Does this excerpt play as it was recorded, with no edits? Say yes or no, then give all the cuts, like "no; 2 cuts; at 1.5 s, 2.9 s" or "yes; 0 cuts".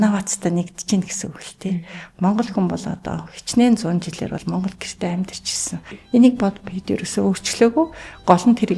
no; 1 cut; at 5.9 s